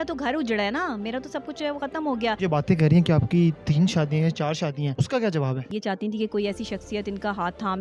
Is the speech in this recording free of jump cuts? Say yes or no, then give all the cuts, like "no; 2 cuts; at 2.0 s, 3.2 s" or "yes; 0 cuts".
no; 3 cuts; at 2.4 s, 4.9 s, 5.7 s